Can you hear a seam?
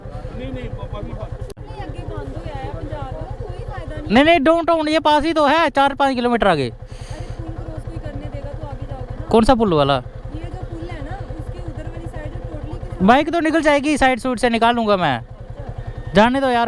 yes; 1 cut; at 1.6 s

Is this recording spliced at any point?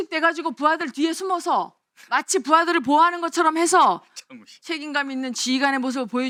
no; 0 cuts

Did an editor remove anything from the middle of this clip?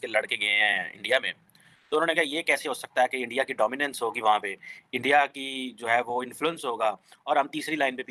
no; 0 cuts

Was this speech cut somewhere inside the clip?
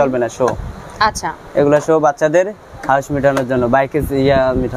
no; 0 cuts

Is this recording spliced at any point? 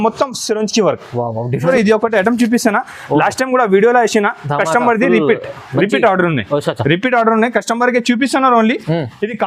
yes; 1 cut; at 1.7 s

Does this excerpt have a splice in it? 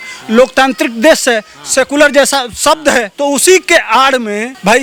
no; 0 cuts

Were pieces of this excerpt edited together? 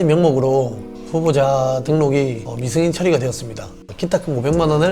yes; 1 cut; at 3.8 s

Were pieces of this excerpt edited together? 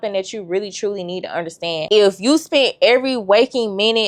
no; 0 cuts

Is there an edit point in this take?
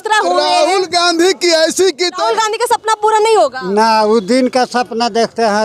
yes; 1 cut; at 2.2 s

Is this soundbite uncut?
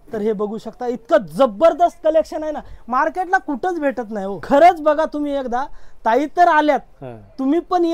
yes; 0 cuts

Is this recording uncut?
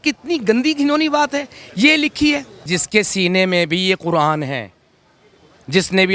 no; 1 cut; at 2.7 s

